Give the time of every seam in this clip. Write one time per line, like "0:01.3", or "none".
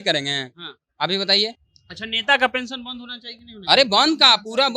none